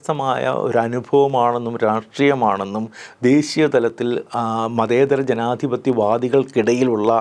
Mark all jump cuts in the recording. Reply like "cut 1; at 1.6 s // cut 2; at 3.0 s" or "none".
none